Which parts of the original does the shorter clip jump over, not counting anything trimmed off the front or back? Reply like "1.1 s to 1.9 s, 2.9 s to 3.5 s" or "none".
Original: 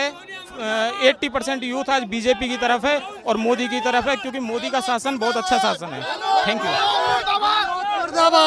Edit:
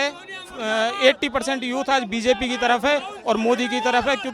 none

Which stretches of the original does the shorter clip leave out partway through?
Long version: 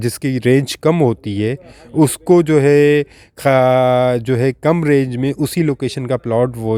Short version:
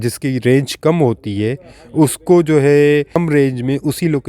3.2 s to 4.7 s

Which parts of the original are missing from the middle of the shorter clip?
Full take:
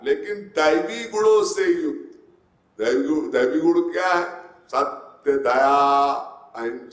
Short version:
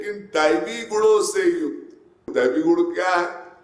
2.5 s to 3.3 s

